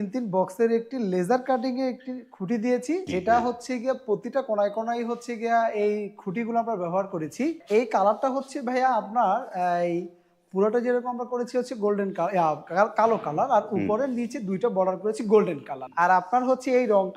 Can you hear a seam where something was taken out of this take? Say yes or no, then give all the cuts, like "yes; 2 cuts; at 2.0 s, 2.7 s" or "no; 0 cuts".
yes; 3 cuts; at 3.1 s, 7.6 s, 15.8 s